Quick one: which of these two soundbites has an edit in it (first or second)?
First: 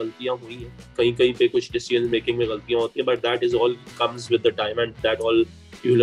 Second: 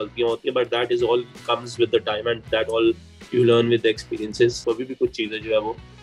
second